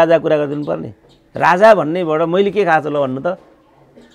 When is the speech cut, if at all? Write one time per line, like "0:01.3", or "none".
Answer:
none